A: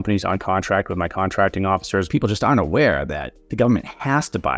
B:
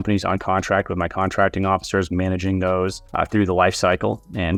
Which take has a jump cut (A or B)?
A